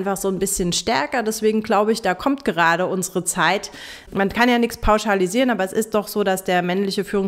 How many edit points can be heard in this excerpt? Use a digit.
1